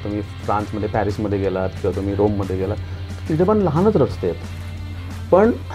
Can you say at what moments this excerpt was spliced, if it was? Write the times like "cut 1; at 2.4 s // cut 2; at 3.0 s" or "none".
none